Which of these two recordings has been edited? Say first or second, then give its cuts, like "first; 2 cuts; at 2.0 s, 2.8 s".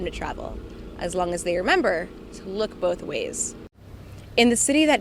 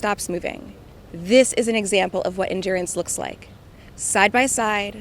first; 1 cut; at 3.7 s